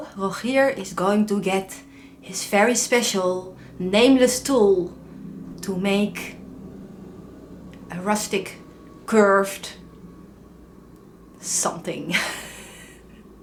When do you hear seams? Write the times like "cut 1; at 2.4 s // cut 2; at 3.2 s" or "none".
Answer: none